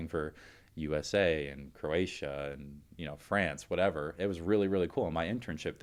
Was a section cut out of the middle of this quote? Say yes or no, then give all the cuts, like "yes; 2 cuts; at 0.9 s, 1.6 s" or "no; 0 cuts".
no; 0 cuts